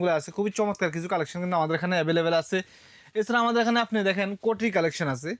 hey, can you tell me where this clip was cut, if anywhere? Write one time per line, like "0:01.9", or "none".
none